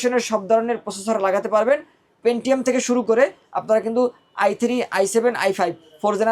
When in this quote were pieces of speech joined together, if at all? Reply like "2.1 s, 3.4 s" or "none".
none